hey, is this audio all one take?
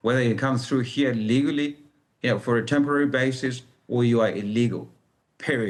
yes; 0 cuts

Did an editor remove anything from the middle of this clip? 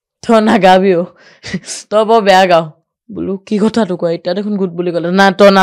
no; 0 cuts

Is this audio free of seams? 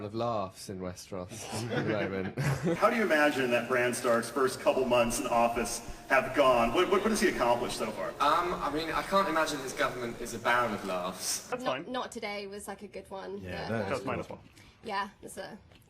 no; 2 cuts; at 2.8 s, 11.5 s

